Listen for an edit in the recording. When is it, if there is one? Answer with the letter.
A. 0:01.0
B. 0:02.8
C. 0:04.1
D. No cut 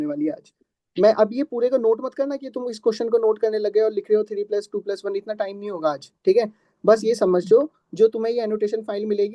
D